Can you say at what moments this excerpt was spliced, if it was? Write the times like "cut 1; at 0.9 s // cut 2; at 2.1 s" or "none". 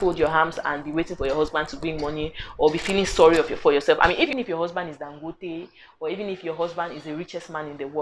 cut 1; at 4.3 s